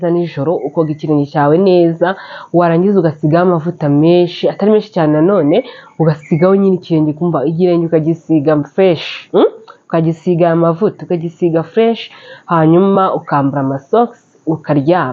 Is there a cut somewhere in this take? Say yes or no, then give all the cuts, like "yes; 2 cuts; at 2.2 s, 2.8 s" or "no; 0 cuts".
no; 0 cuts